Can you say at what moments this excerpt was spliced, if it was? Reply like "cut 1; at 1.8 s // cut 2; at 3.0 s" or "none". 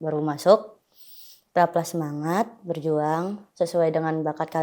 none